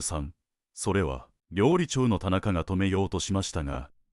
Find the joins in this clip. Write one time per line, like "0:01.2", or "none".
none